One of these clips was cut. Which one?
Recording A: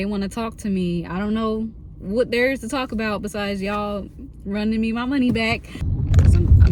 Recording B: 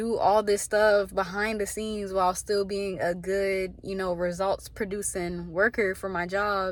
A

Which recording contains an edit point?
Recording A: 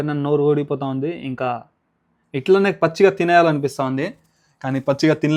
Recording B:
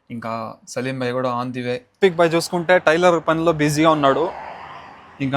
B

